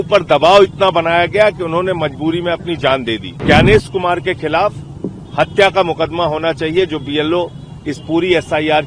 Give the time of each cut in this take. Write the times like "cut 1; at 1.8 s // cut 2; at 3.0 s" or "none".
cut 1; at 3.4 s